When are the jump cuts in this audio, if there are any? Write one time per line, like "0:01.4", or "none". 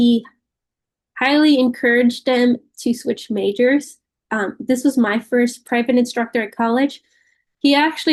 none

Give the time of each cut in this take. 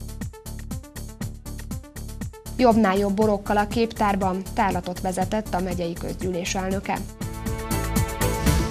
none

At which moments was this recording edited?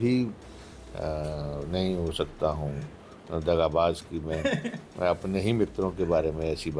none

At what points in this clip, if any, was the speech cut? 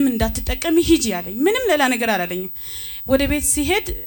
none

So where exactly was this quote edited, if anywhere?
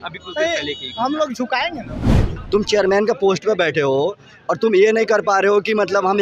0:02.3

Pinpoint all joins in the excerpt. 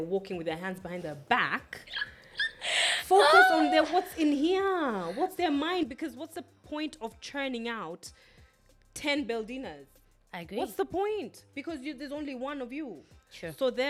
none

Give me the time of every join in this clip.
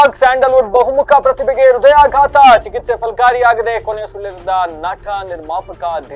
none

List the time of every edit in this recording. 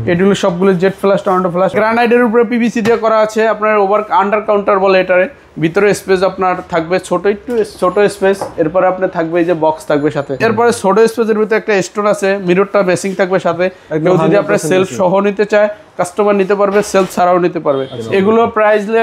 0:01.7
0:10.3
0:18.0

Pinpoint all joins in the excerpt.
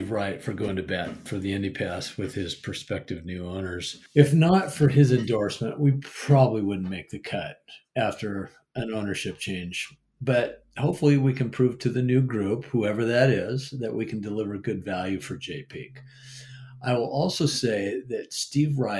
0:01.2
0:04.0

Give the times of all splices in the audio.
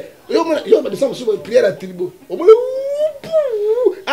none

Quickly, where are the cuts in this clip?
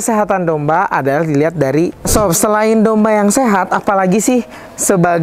0:02.0

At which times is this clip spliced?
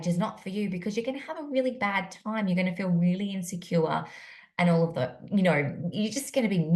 none

